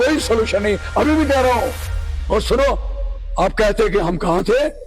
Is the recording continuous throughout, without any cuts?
no; 1 cut; at 2.1 s

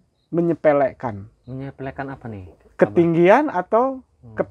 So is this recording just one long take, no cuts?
no; 1 cut; at 1.3 s

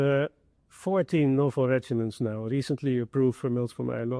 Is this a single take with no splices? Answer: yes; 0 cuts

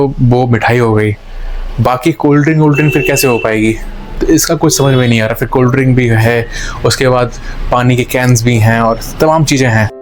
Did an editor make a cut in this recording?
no; 0 cuts

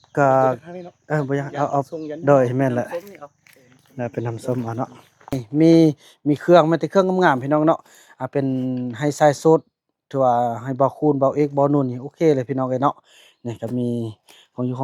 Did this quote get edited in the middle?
yes; 1 cut; at 5.4 s

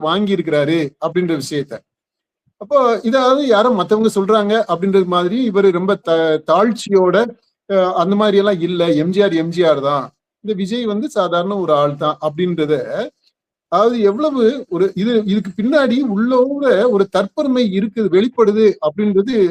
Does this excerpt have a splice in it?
no; 0 cuts

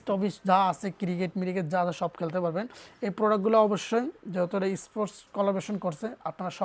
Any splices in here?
no; 0 cuts

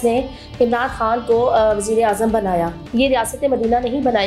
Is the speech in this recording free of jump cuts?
no; 1 cut; at 2.8 s

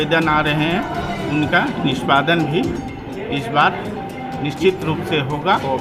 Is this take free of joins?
yes; 0 cuts

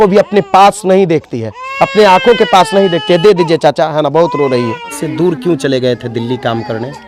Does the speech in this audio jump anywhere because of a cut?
yes; 1 cut; at 5.0 s

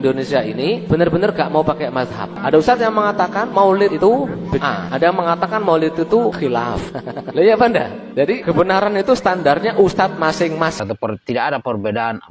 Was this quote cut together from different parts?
yes; 2 cuts; at 2.3 s, 10.8 s

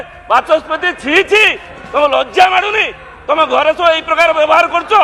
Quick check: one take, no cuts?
yes; 0 cuts

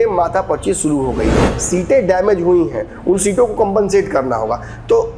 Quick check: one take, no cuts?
no; 1 cut; at 1.5 s

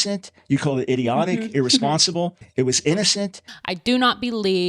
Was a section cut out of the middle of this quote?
yes; 1 cut; at 3.4 s

